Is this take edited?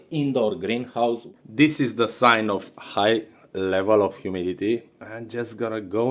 yes; 1 cut; at 1.3 s

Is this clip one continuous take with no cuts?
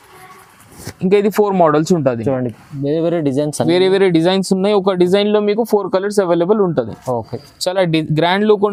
yes; 0 cuts

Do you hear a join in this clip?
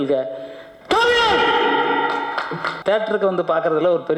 yes; 1 cut; at 2.7 s

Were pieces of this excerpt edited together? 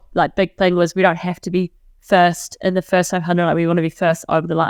no; 0 cuts

